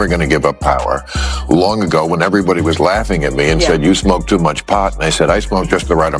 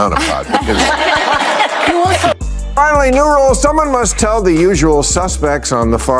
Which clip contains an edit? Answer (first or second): second